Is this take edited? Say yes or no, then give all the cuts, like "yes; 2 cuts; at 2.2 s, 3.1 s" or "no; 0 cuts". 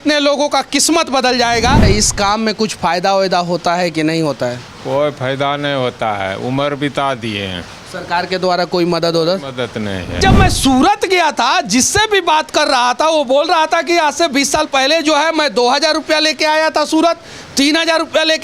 yes; 2 cuts; at 1.8 s, 10.2 s